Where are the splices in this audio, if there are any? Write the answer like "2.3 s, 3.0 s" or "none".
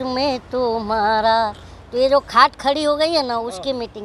none